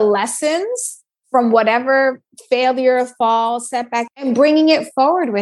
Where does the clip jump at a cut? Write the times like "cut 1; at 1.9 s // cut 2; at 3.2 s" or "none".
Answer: cut 1; at 4.3 s